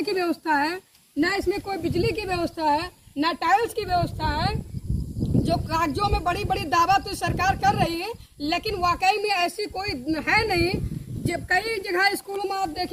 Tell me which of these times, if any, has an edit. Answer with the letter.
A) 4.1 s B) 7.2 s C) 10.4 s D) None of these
D